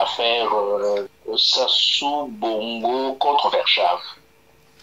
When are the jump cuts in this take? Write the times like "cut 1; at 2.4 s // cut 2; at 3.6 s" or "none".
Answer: cut 1; at 1.2 s